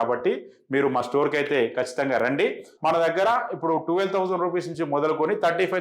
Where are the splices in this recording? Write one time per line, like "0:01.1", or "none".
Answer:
0:02.7